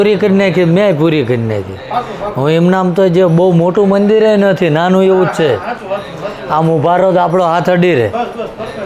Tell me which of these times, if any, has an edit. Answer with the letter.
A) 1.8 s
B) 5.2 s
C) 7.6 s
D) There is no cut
D